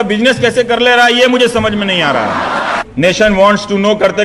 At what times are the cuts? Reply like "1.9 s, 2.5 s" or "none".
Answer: 2.8 s